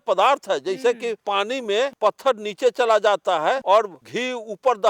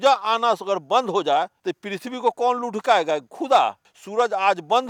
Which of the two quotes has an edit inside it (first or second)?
first